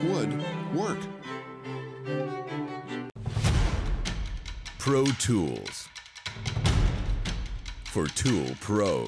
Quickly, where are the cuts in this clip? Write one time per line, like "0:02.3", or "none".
0:03.2